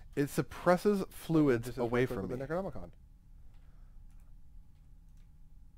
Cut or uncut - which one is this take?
cut